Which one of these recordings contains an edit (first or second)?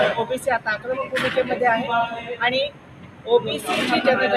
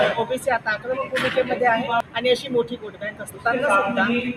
second